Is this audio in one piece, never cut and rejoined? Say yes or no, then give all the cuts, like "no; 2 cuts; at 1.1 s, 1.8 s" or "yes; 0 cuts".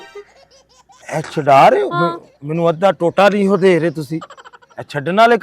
yes; 0 cuts